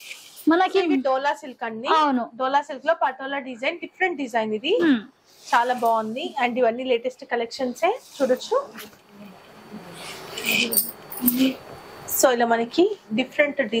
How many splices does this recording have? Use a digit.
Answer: 0